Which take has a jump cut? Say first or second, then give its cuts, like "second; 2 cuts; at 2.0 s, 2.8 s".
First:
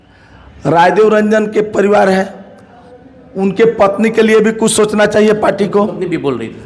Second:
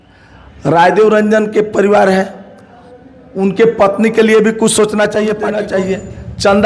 second; 1 cut; at 5.6 s